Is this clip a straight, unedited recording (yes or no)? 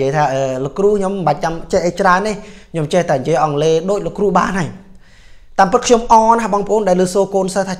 yes